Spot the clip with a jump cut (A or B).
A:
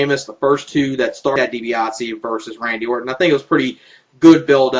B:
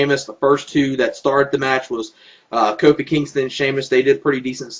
B